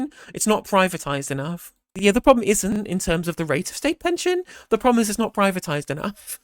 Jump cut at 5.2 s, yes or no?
no